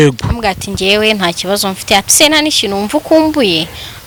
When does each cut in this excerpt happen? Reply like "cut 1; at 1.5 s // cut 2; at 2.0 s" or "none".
none